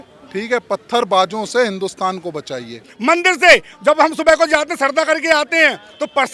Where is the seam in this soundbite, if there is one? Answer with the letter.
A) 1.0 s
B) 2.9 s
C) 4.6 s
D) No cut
B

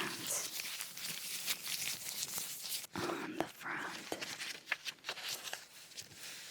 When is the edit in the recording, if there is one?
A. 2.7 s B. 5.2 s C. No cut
A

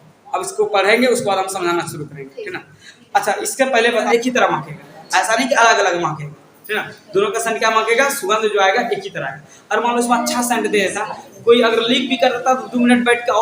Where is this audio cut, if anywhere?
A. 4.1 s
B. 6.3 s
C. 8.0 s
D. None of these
A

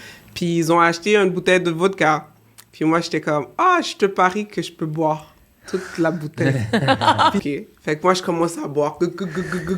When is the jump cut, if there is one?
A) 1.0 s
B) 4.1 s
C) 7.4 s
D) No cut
C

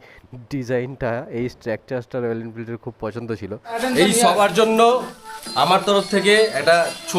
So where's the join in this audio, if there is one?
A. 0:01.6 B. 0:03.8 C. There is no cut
B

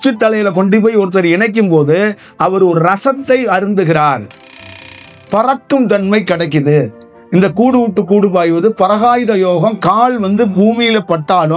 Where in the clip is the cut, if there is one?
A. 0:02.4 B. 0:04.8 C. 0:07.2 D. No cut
B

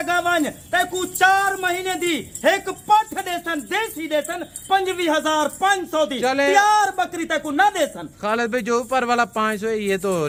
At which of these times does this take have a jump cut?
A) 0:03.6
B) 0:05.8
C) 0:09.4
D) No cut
D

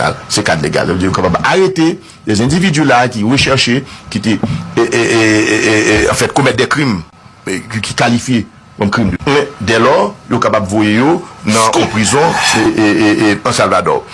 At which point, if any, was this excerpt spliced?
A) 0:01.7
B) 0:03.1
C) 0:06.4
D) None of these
A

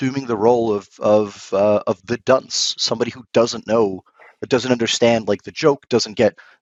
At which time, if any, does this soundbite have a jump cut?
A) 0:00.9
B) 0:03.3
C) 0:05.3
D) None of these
D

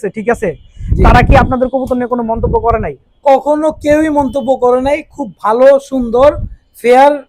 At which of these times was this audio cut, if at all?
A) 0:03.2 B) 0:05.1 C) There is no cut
C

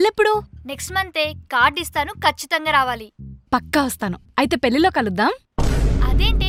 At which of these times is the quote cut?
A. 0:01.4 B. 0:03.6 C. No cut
C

